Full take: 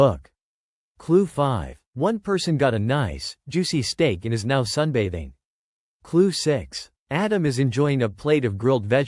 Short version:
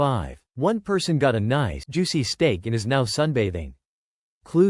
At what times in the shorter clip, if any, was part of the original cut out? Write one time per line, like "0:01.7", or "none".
0:01.8

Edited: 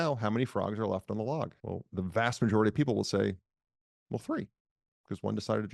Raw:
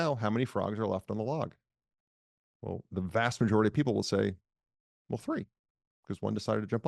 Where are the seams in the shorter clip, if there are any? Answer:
0:01.6

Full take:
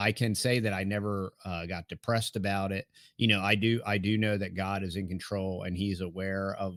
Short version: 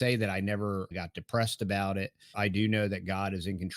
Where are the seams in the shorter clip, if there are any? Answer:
0:00.9
0:02.3

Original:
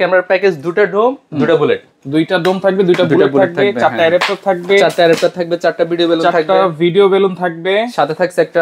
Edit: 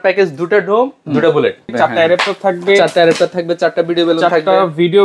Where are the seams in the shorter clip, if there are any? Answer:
0:01.7

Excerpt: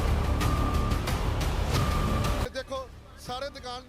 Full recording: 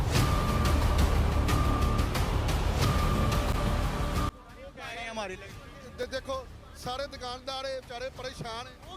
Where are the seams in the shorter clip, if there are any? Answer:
0:02.5

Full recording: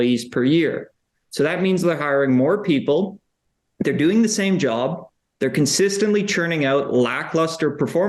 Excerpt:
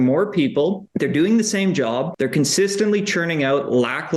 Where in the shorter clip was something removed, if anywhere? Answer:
0:00.8
0:02.1

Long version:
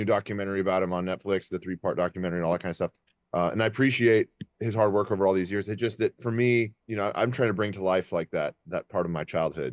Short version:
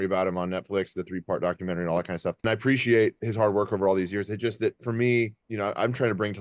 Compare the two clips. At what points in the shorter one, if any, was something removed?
0:02.4
0:03.2

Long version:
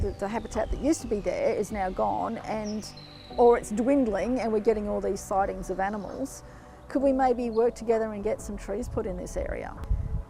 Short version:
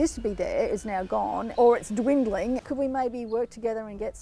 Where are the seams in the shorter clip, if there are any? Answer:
0:01.5
0:02.6

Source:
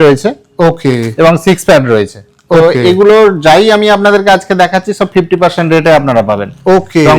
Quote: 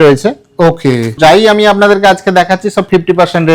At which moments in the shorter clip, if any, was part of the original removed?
0:01.1

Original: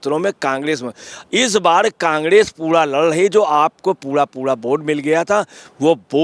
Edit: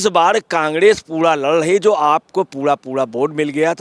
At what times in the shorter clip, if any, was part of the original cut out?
none

